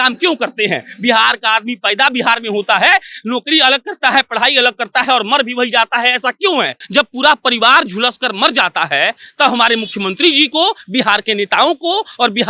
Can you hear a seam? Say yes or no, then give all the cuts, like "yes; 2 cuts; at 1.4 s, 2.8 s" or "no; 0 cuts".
yes; 1 cut; at 6.8 s